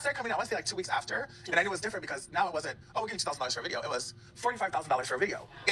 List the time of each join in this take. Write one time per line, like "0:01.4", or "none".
none